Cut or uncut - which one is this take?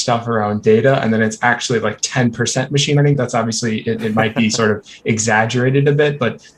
uncut